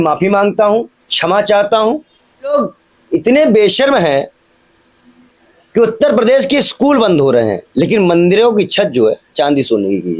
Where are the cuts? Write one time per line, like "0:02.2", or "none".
0:02.5